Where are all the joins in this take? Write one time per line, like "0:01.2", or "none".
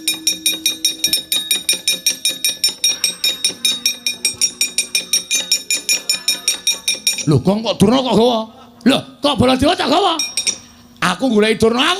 0:01.0